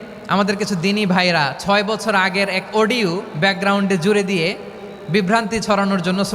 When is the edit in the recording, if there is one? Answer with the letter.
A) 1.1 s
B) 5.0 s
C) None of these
C